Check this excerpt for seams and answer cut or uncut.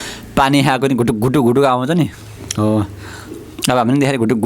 uncut